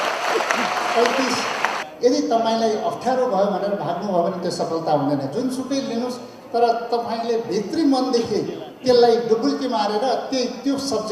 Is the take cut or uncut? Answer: cut